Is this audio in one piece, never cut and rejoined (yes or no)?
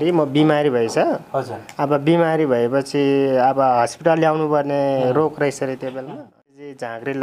no